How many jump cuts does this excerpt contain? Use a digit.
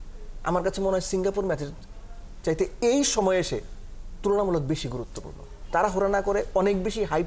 1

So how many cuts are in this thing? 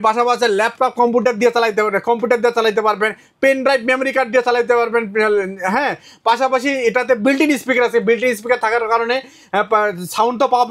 0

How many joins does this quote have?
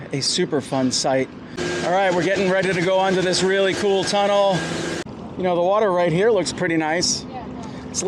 2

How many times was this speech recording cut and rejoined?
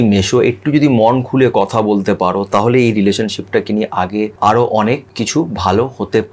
2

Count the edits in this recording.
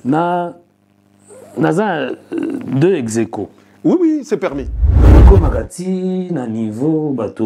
1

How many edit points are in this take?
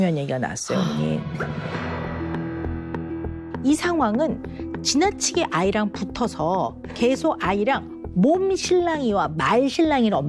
1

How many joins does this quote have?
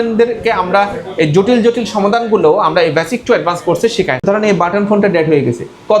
1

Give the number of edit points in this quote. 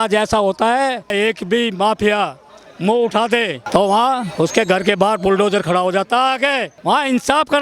3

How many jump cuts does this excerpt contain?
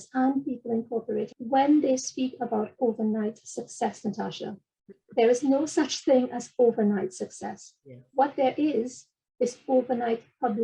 1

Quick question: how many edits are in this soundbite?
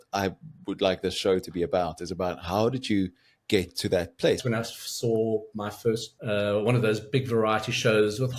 2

